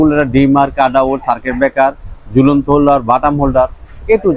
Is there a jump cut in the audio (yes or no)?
no